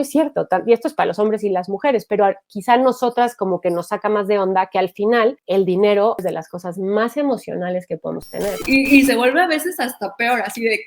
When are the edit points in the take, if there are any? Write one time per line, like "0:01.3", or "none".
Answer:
0:06.2
0:08.6